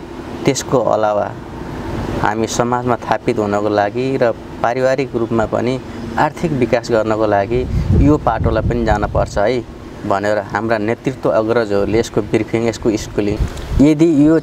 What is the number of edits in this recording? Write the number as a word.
one